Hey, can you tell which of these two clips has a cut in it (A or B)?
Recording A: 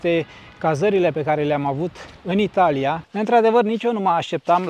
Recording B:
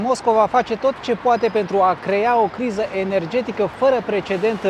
A